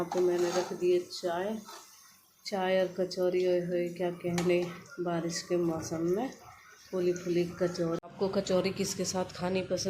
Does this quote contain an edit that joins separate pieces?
yes; 1 cut; at 8.0 s

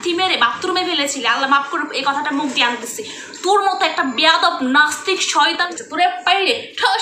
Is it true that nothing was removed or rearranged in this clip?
no; 1 cut; at 5.7 s

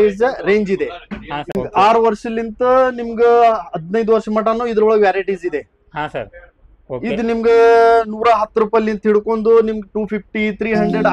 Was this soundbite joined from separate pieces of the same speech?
yes; 1 cut; at 1.6 s

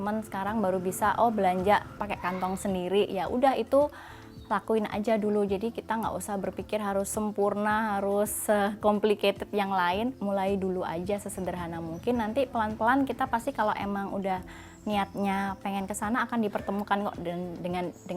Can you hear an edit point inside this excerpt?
yes; 2 cuts; at 1.9 s, 10.2 s

